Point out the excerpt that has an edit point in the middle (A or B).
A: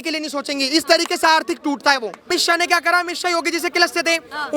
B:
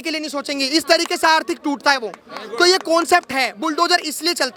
A